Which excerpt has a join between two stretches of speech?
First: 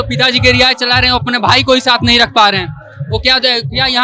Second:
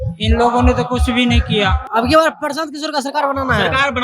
second; 1 cut; at 1.8 s

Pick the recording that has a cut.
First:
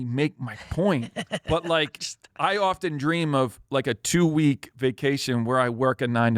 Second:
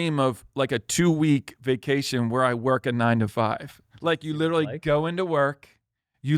first; 1 cut; at 1.4 s

